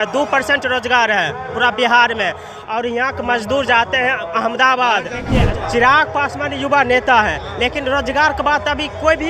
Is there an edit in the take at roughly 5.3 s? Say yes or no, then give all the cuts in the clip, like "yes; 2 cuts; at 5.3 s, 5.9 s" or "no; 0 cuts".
yes; 1 cut; at 5.3 s